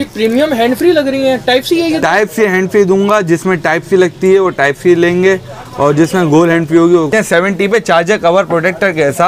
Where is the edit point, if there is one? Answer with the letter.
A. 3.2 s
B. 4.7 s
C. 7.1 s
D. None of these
C